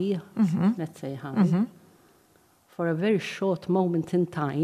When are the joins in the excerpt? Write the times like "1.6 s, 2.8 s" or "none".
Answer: none